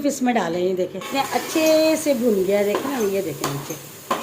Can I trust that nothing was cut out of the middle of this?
no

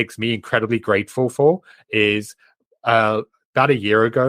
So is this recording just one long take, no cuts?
yes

